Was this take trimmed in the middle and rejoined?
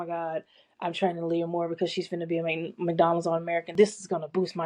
yes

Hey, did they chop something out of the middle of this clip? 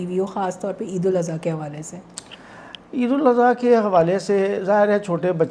no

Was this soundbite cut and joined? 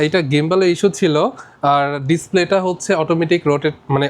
no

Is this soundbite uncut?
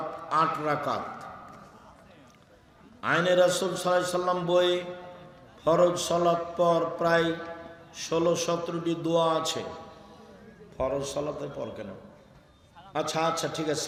yes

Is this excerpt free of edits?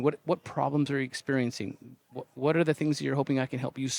yes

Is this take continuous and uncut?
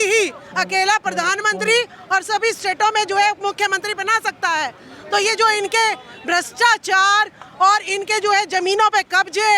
yes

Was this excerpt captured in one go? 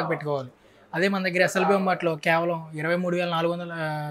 yes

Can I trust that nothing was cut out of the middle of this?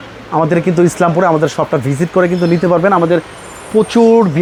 yes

